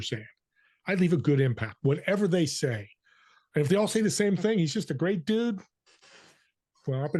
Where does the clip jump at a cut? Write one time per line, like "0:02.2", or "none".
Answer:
none

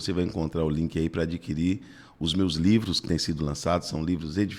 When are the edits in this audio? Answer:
none

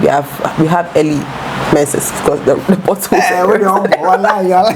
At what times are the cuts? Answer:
none

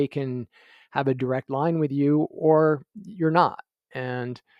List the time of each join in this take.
none

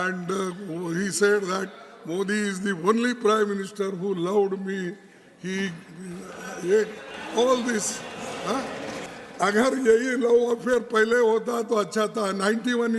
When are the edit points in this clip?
0:09.1

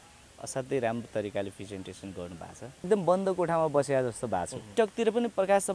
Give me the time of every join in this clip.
0:02.9
0:04.7

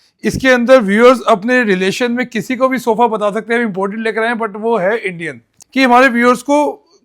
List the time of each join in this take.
0:05.5

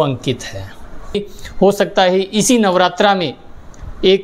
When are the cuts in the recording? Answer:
0:01.1

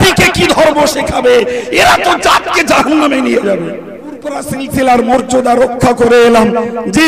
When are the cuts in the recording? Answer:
0:04.4

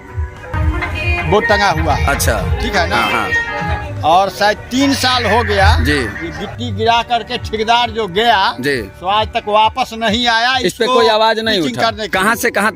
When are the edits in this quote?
none

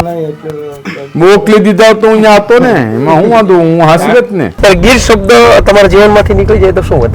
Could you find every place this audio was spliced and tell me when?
0:04.5

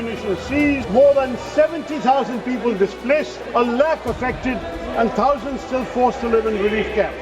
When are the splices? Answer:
0:00.8
0:03.4

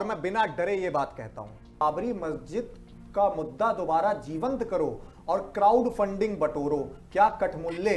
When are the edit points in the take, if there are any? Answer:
0:01.8

